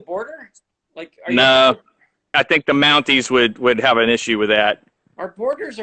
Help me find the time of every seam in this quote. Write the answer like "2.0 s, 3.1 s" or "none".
2.3 s